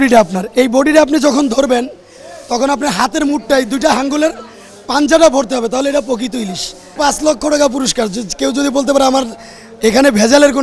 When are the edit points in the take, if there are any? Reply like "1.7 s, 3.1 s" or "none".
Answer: 6.9 s